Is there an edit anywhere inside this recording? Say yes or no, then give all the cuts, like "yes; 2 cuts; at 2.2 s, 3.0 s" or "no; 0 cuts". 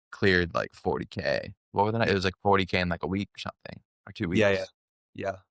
no; 0 cuts